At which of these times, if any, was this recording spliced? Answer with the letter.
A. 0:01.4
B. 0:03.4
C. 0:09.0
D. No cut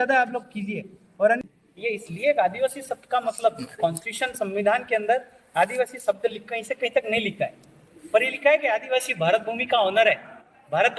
A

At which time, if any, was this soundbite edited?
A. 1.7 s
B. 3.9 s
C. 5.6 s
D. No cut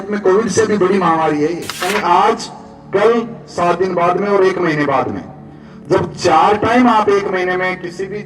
A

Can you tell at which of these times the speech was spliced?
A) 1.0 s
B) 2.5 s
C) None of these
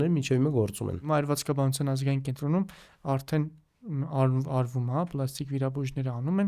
A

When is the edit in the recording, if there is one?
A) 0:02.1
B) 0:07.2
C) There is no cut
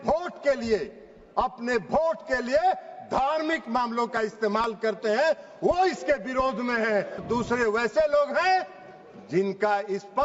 B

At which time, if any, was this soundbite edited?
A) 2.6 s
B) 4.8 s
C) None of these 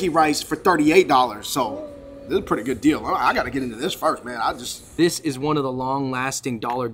B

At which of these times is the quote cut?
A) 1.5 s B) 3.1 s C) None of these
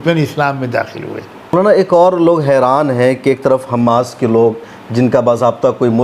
A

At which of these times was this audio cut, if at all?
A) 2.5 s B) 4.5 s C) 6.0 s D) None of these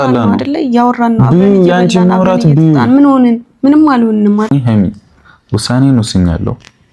B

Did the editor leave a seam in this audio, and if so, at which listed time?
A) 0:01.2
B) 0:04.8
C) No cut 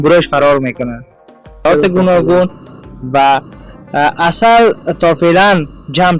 A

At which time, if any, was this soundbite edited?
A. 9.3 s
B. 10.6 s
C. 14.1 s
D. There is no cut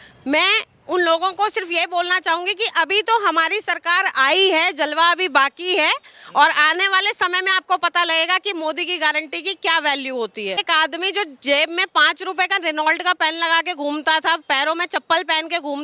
B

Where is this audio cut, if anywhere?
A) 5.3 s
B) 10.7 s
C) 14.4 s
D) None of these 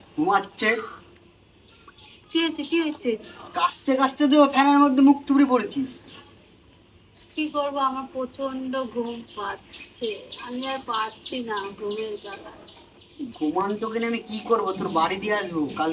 D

